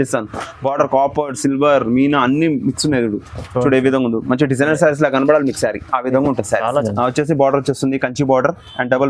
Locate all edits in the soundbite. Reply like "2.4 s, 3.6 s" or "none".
6.7 s

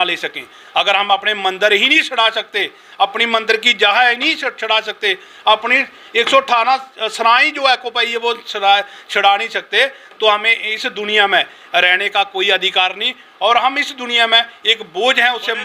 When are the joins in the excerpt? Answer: none

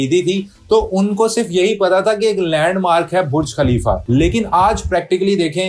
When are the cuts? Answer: 4.0 s

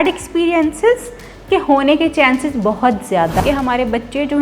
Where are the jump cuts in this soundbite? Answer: 3.4 s

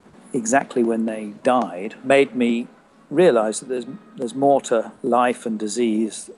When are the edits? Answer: 2.0 s, 4.9 s

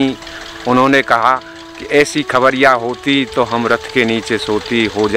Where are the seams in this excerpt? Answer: none

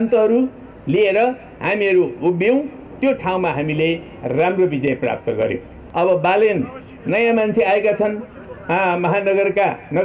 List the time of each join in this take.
5.8 s

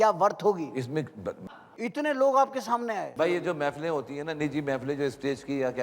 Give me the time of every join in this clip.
1.4 s

